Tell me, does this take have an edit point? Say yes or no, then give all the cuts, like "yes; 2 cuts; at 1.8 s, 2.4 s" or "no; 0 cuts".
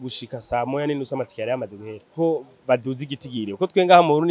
yes; 1 cut; at 2.1 s